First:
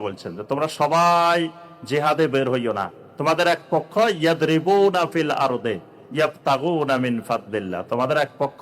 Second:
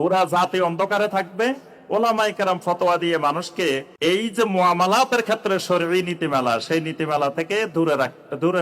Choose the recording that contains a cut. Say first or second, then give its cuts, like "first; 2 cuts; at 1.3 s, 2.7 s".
second; 1 cut; at 3.9 s